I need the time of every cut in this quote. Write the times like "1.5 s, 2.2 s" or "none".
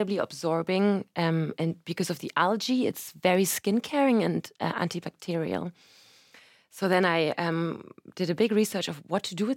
none